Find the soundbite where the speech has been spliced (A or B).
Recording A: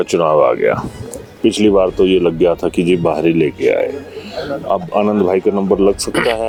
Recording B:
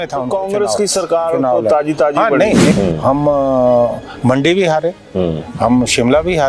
B